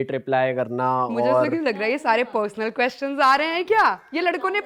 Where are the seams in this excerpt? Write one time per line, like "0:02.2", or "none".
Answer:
none